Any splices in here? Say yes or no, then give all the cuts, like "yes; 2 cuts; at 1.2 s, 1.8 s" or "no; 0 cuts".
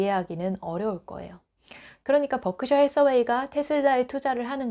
yes; 1 cut; at 1.9 s